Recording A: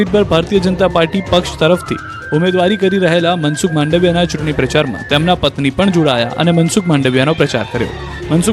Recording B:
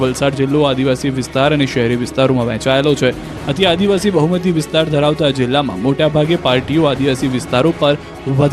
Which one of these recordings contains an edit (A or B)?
A